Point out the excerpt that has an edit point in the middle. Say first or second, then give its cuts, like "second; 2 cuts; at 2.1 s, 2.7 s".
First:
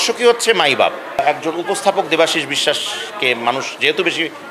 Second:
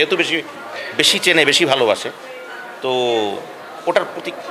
first; 1 cut; at 1.2 s